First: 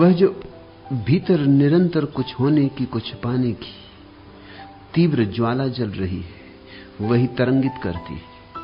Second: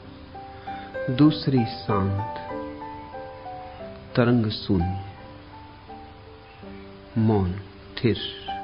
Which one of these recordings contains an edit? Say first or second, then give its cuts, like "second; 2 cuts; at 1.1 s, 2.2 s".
second; 2 cuts; at 2.2 s, 3.4 s